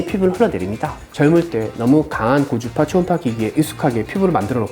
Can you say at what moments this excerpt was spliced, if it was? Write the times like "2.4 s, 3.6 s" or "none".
1.0 s